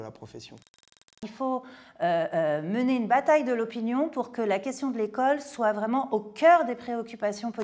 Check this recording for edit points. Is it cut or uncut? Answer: cut